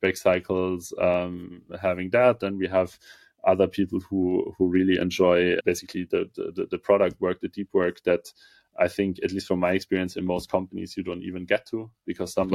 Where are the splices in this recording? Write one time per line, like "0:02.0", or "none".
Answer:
0:05.6